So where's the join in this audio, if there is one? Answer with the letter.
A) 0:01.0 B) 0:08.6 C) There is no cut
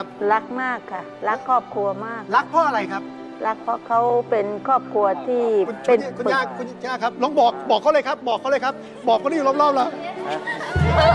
C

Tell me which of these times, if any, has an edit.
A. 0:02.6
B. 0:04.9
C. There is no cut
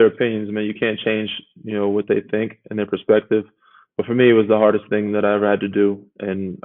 C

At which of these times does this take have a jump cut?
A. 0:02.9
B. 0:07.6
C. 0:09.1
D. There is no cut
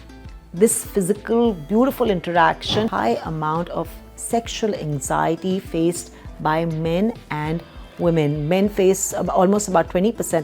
A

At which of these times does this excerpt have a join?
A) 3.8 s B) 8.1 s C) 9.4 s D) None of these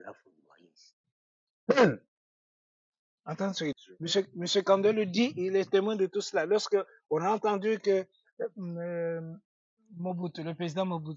A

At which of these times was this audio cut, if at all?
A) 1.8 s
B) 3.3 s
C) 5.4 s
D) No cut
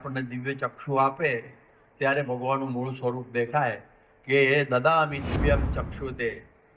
C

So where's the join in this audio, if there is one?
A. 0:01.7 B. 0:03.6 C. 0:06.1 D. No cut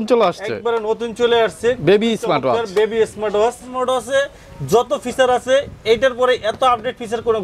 B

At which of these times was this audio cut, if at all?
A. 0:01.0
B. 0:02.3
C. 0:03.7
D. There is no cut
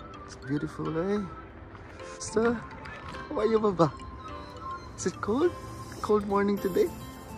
B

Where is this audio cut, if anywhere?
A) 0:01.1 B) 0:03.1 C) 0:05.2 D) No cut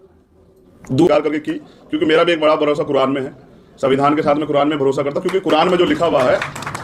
A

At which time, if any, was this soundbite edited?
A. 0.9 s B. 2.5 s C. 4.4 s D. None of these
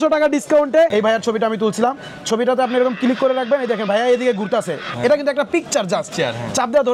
A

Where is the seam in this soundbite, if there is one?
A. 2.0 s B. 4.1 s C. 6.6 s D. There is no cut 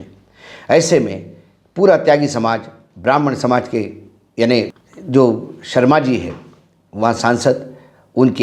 D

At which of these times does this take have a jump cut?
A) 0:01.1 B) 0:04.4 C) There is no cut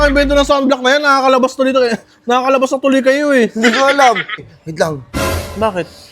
B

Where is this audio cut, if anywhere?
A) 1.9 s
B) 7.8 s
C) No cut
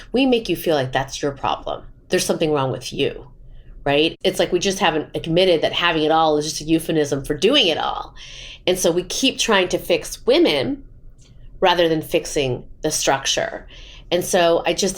A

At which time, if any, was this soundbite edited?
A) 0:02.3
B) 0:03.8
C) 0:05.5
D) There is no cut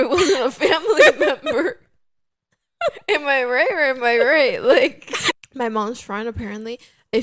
C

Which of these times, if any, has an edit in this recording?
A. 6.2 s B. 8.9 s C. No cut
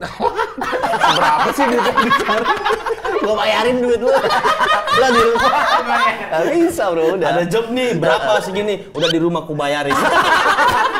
C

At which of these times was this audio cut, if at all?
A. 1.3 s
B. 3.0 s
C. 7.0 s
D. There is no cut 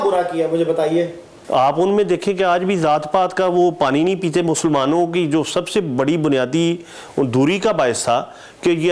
A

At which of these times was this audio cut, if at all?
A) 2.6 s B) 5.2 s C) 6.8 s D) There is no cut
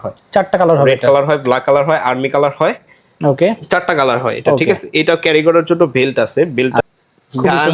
C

